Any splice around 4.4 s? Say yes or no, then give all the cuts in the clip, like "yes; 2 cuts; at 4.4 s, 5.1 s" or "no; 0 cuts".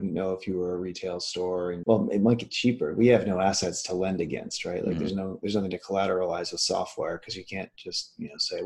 no; 1 cut; at 1.8 s